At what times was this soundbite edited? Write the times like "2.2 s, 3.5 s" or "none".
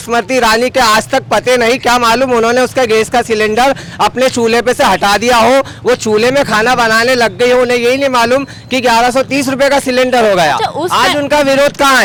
none